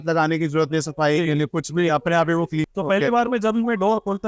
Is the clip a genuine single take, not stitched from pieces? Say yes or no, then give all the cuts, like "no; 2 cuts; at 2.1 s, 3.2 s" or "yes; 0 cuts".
no; 1 cut; at 2.7 s